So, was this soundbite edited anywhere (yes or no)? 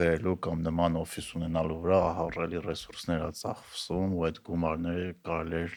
no